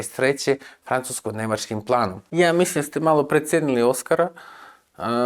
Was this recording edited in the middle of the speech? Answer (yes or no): yes